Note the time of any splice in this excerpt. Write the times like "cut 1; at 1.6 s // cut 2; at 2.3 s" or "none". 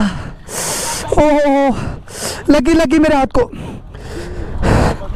none